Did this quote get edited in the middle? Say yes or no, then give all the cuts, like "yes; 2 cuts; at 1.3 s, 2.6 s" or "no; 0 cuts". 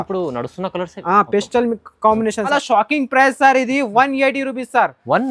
yes; 1 cut; at 2.5 s